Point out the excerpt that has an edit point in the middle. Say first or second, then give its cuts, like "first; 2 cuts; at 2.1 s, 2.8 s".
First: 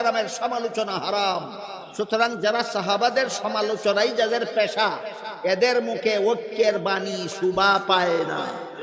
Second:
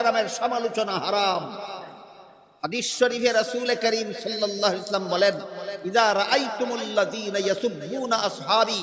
first; 1 cut; at 1.8 s